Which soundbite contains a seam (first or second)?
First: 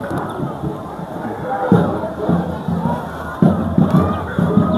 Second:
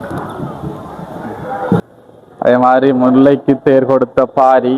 second